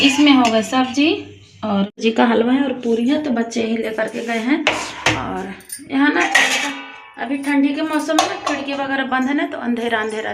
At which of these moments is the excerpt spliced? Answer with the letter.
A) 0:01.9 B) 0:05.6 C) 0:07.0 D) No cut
A